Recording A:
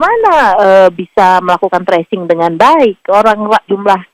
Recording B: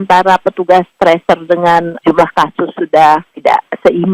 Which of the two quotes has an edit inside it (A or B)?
B